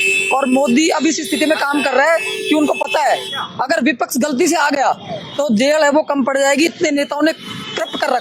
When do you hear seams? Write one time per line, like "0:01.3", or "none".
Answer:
none